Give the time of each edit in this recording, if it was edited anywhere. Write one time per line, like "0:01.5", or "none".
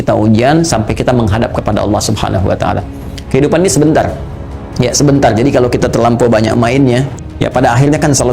0:07.2